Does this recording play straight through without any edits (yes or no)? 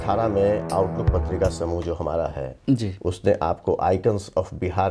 yes